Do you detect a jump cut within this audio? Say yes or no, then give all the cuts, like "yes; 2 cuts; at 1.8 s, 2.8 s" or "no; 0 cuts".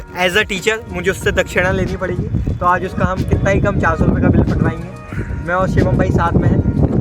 no; 0 cuts